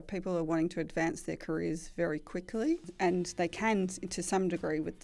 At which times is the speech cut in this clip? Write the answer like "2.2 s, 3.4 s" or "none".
2.9 s